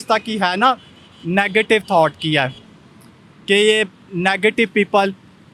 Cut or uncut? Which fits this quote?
uncut